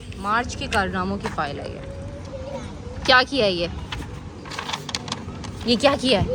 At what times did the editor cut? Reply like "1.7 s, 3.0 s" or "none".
none